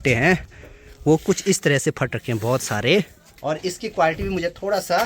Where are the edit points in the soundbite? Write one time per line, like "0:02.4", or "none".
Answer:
0:03.3